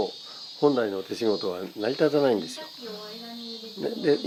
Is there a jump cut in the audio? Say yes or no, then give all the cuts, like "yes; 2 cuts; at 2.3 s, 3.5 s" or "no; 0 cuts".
no; 0 cuts